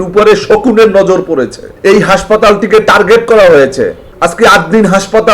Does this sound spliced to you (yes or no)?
yes